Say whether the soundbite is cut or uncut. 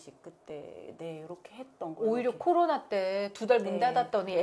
uncut